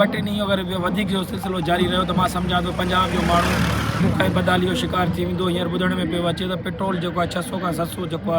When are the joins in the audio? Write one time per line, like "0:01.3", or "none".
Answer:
none